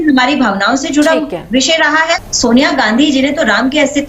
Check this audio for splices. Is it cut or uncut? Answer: cut